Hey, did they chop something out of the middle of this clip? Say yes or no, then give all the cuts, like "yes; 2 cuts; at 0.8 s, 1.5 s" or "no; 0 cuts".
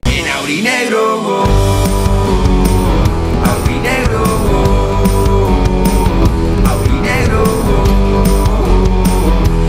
no; 0 cuts